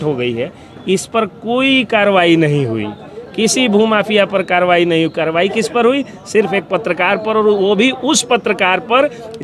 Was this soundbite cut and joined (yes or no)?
no